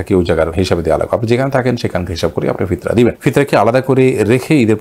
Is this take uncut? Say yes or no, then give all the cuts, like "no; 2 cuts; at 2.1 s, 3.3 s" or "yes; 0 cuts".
yes; 0 cuts